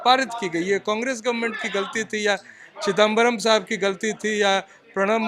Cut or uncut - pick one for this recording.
uncut